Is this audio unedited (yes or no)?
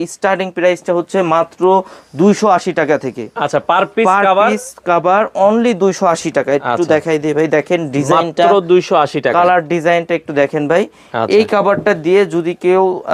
yes